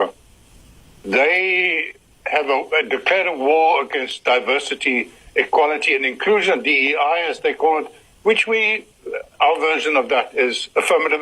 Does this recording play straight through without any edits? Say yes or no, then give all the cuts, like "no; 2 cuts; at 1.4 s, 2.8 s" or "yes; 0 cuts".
yes; 0 cuts